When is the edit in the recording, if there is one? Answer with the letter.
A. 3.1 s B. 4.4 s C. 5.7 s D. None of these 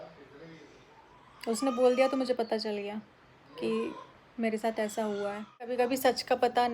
C